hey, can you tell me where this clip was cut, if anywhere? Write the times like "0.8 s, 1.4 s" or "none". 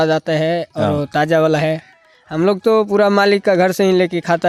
none